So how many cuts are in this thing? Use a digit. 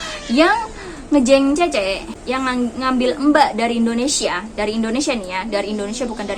1